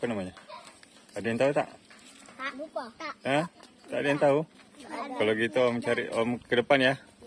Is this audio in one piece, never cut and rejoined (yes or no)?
yes